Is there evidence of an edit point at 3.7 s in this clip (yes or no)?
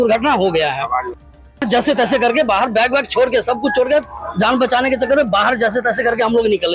no